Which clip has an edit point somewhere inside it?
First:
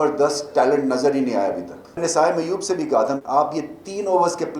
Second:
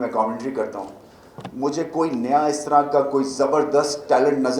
first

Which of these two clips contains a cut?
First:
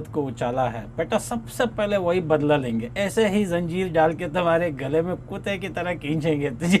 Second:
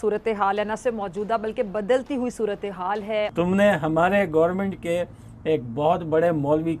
second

